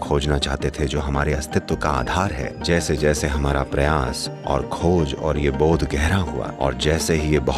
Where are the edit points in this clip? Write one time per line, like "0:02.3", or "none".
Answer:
0:02.5
0:06.4